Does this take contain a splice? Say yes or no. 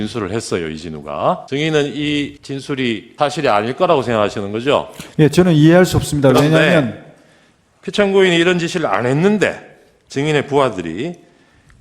yes